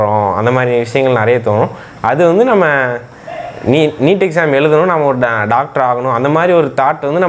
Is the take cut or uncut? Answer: uncut